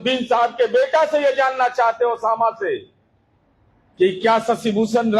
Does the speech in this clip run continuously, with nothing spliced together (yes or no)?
yes